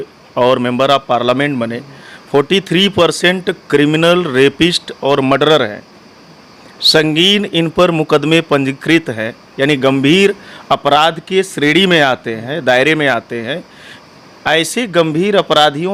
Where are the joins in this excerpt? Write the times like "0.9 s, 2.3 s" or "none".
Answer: none